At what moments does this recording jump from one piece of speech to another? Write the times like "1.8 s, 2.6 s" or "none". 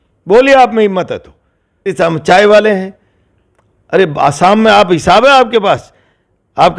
1.9 s